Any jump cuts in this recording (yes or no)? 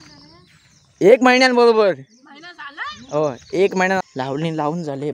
yes